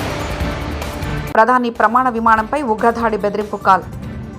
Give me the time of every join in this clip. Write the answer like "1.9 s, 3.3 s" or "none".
1.3 s